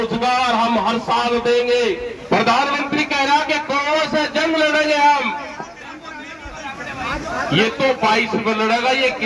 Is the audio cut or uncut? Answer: cut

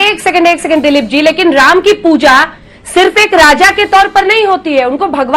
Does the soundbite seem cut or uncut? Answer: uncut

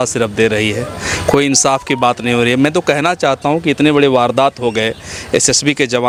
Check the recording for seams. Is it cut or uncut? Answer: uncut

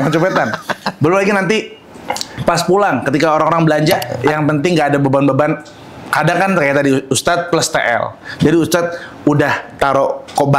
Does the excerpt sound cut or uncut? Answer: cut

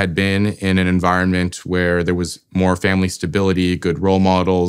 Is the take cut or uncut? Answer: uncut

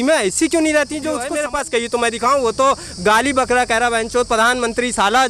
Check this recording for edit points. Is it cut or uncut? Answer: cut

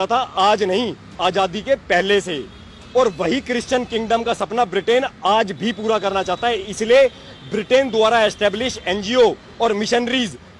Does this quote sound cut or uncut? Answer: uncut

